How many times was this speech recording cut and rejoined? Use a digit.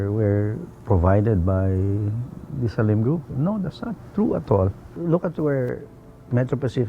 1